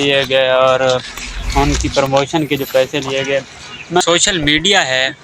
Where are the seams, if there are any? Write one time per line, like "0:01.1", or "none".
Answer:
0:04.0